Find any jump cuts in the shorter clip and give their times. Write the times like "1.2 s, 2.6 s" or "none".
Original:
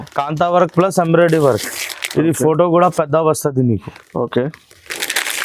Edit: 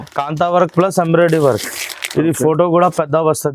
none